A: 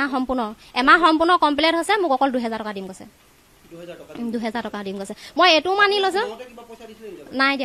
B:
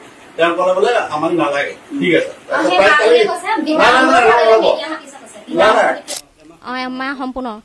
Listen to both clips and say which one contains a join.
B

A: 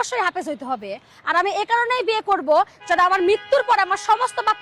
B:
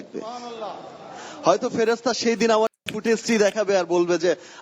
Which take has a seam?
B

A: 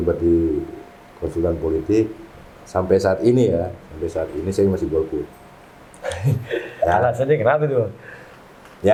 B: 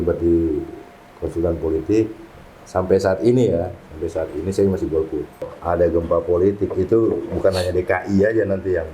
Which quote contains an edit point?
B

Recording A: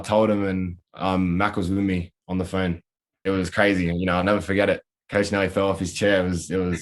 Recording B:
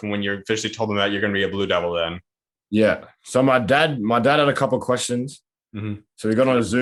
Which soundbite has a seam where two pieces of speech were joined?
A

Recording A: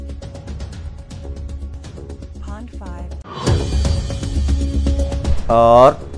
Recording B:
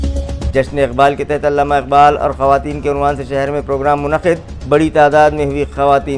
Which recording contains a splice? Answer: A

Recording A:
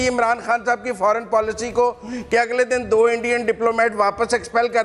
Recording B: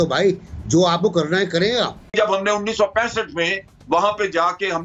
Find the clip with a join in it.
B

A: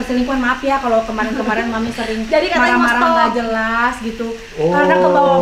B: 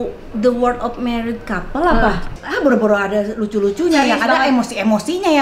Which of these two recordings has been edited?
B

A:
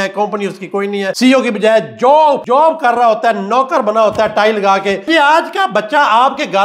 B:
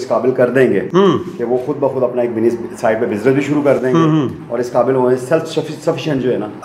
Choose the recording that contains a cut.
A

